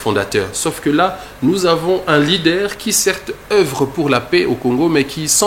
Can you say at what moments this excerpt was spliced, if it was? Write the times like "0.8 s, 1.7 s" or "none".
none